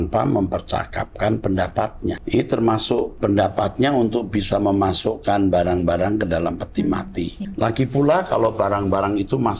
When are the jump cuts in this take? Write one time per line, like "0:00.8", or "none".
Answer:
0:02.2
0:03.1
0:07.5